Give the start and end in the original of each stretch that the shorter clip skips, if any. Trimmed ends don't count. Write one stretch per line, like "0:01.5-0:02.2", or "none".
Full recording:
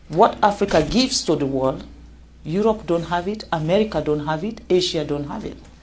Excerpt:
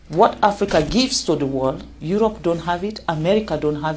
0:01.9-0:02.3